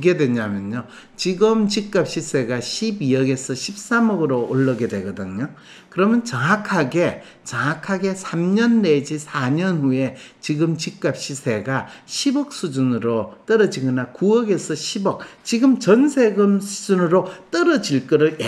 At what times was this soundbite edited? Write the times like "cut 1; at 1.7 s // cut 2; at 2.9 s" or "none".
none